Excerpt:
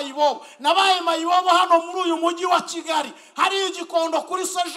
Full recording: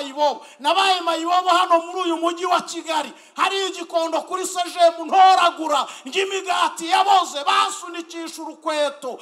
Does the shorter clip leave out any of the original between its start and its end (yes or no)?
no